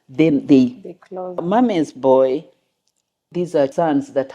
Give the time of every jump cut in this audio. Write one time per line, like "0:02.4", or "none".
0:01.4
0:03.3